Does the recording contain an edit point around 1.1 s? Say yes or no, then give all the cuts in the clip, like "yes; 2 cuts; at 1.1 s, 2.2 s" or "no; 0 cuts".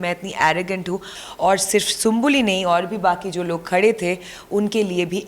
yes; 1 cut; at 1.1 s